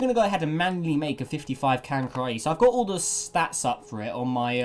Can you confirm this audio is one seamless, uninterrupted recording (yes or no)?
no